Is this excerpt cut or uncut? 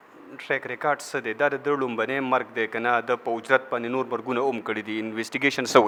uncut